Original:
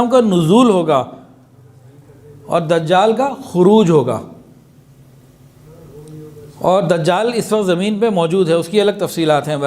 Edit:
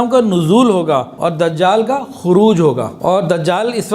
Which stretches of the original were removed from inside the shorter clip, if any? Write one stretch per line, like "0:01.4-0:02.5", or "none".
0:01.1-0:02.4
0:04.2-0:06.5